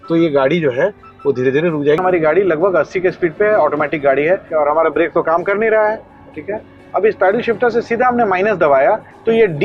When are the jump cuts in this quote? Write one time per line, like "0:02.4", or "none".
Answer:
0:02.0
0:04.5